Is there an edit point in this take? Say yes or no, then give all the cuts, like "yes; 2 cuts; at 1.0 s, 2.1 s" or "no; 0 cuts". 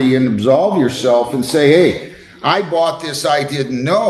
no; 0 cuts